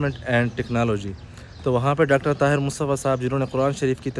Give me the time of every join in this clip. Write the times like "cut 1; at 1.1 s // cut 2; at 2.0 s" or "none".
none